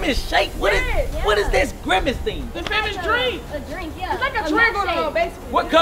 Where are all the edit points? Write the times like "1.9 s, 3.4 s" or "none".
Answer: none